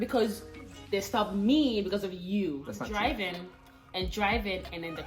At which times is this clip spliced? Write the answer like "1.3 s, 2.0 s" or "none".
2.8 s